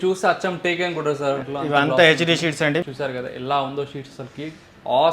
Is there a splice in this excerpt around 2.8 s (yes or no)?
yes